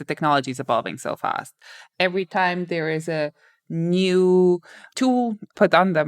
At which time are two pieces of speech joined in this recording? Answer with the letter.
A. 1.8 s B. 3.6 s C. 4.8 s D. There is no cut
A